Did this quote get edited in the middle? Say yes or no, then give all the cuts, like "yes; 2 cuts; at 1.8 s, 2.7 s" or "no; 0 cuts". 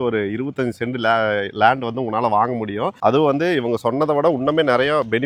no; 0 cuts